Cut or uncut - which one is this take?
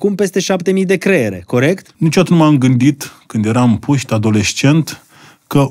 cut